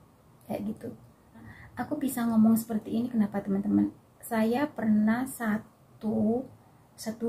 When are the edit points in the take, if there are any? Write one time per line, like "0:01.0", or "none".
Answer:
none